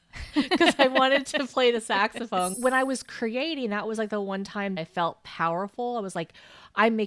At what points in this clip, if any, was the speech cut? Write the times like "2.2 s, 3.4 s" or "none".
2.5 s, 4.8 s